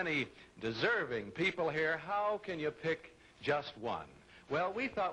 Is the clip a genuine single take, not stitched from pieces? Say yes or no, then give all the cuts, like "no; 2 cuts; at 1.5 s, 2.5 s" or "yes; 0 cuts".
yes; 0 cuts